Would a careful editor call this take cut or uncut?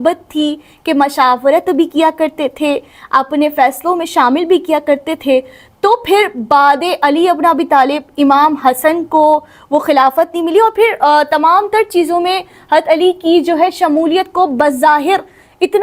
uncut